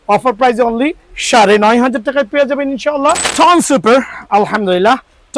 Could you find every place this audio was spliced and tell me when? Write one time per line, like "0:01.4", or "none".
0:03.3